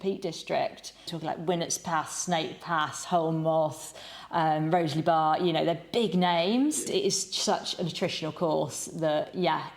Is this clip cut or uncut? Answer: cut